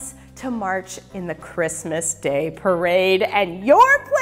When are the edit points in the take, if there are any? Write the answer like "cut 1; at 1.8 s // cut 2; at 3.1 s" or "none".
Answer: none